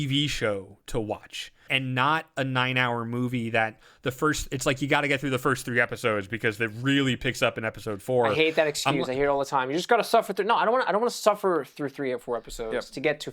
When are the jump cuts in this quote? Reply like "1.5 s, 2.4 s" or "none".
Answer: 1.6 s

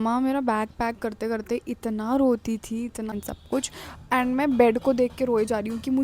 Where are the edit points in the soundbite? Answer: 3.1 s

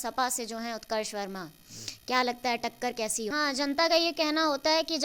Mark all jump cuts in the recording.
3.3 s

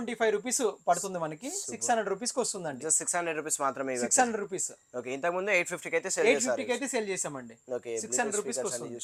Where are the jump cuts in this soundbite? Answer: none

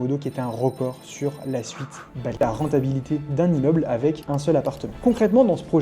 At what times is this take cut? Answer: 2.4 s, 5.0 s

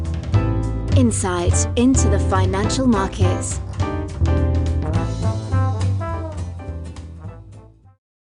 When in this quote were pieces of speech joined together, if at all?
none

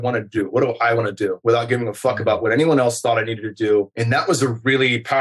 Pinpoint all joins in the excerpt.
1.4 s

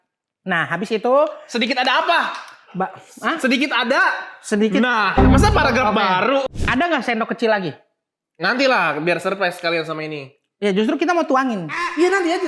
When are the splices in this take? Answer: 6.5 s

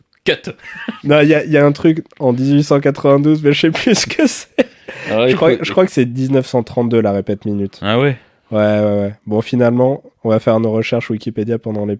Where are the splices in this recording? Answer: 10.1 s

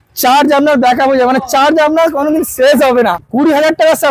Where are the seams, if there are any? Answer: 3.2 s

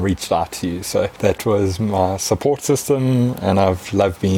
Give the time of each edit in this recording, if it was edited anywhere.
1.1 s

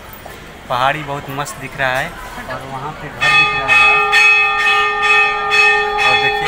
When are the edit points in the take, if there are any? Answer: none

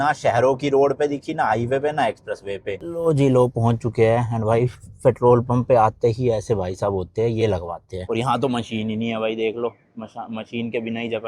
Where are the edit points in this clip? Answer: 2.8 s, 7.9 s

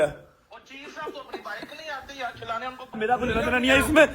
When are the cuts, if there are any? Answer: 3.0 s

